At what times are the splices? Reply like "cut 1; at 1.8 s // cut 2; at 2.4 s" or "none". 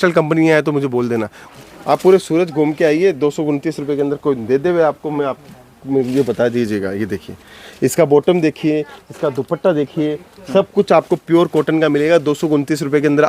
cut 1; at 1.6 s